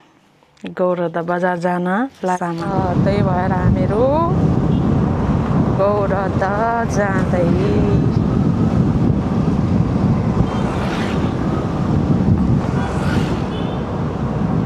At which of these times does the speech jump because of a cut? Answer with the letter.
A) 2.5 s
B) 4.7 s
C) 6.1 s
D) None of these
A